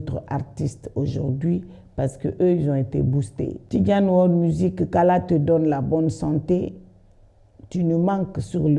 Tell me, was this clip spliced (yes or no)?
yes